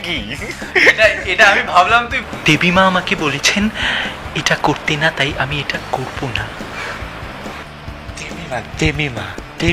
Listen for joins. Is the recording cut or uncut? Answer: cut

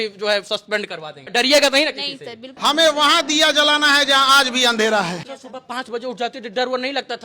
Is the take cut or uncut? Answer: cut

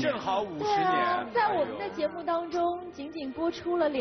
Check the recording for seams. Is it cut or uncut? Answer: uncut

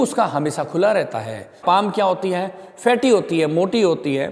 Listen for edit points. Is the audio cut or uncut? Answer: cut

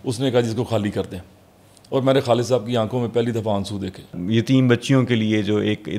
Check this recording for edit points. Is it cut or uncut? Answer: cut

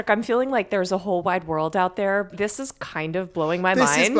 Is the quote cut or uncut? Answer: cut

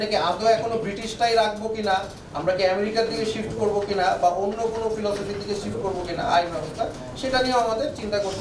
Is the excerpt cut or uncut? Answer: uncut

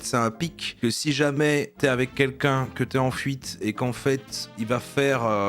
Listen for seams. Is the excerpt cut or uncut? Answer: cut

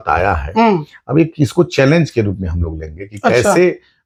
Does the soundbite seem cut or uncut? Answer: uncut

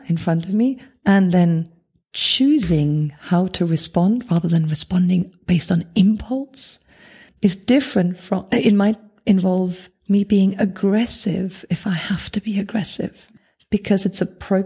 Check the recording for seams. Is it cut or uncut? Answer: cut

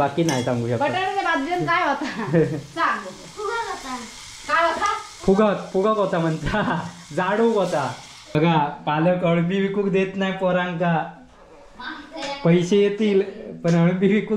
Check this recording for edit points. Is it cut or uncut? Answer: cut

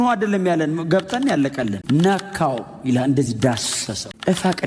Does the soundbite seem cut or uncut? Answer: uncut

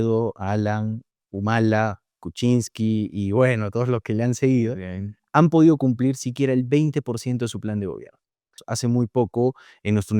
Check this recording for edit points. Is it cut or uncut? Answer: cut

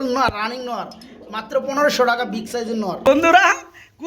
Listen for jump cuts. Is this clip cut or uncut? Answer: cut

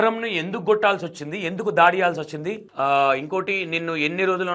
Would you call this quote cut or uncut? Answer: uncut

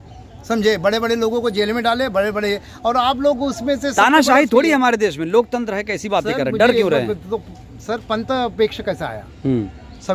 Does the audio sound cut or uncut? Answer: uncut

